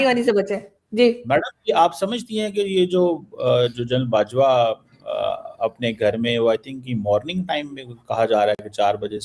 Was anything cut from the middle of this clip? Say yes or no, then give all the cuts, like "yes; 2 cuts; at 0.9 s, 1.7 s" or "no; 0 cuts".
no; 0 cuts